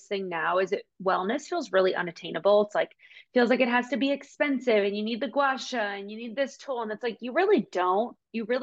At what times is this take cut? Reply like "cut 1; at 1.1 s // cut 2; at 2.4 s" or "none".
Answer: none